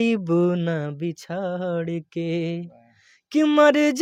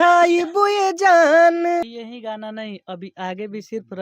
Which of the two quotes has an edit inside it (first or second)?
second